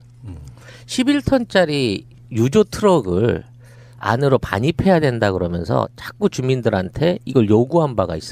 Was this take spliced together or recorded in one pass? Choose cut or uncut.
cut